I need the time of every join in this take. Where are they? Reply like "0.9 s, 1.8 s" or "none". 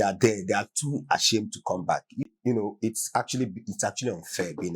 2.2 s